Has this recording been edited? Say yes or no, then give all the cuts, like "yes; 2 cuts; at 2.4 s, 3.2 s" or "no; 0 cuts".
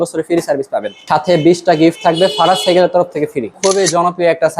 yes; 2 cuts; at 1.0 s, 3.5 s